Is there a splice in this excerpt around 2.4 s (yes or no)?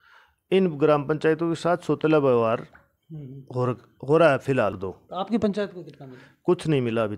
no